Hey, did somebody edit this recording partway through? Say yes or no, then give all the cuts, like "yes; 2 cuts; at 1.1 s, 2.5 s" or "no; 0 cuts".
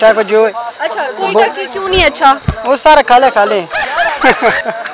no; 0 cuts